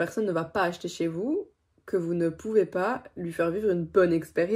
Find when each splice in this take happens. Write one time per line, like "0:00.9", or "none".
none